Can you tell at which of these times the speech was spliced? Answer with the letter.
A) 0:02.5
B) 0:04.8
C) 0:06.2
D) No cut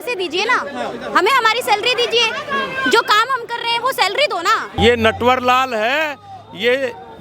B